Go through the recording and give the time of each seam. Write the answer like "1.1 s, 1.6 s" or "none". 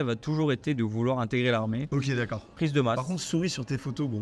2.4 s